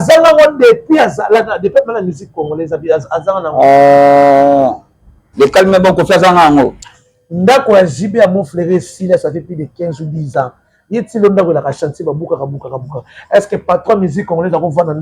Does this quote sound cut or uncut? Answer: cut